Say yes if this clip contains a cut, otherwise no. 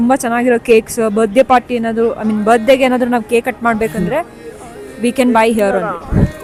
no